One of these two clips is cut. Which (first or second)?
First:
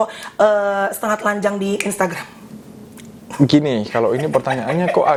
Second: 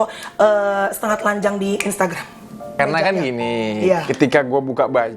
second